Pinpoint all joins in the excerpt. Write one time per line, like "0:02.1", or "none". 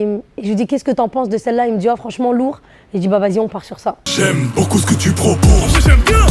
0:04.0

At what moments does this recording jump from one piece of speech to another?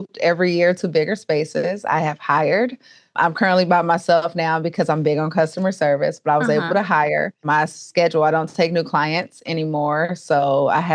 0:07.4

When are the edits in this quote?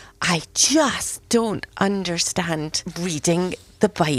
0:02.9

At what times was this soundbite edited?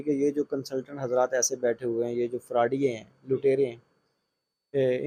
none

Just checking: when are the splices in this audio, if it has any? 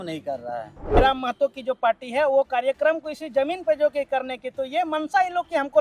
0:01.0

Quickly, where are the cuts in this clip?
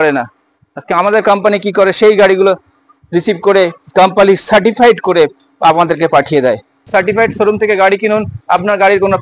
0:06.8

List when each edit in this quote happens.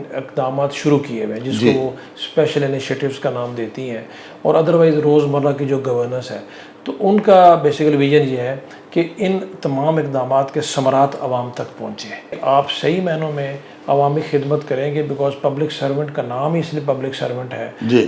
0:12.3

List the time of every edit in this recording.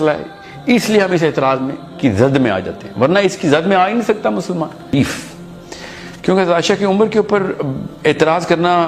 0:04.9

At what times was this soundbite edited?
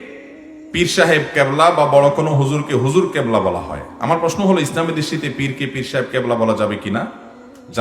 none

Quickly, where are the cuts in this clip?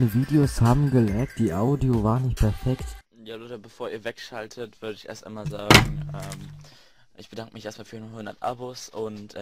0:02.9

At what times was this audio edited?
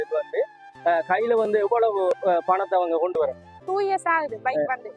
0:03.5

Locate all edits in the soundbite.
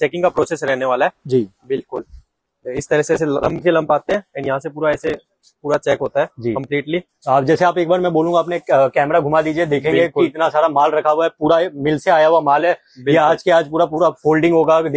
none

